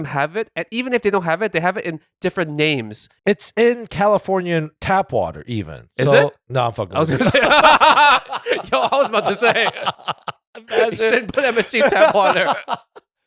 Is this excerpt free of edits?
yes; 0 cuts

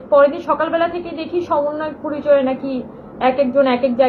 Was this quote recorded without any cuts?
yes; 0 cuts

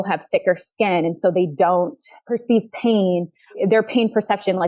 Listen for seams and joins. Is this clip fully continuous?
yes; 0 cuts

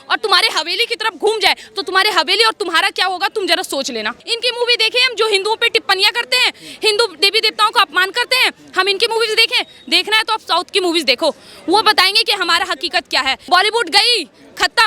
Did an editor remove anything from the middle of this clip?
yes; 2 cuts; at 4.2 s, 13.4 s

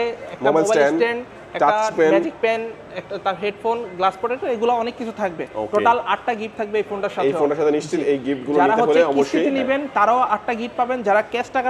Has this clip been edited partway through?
no; 0 cuts

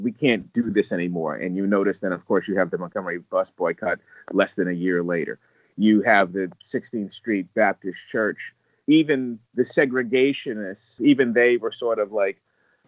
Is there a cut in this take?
yes; 2 cuts; at 8.7 s, 11.0 s

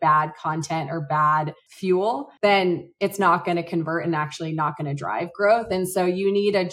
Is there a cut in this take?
yes; 1 cut; at 2.3 s

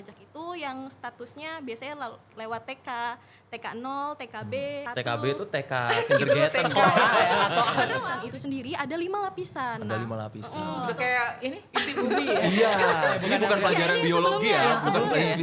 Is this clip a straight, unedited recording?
no; 4 cuts; at 4.9 s, 8.1 s, 10.8 s, 13.2 s

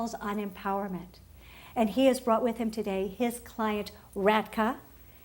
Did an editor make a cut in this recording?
yes; 1 cut; at 1.2 s

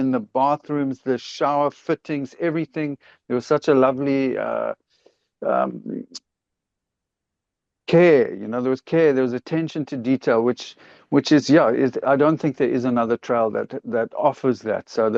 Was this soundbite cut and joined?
no; 0 cuts

